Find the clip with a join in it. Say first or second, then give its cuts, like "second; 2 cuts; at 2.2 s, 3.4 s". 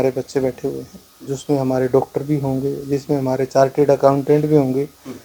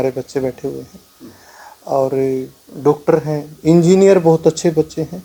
first; 1 cut; at 1.3 s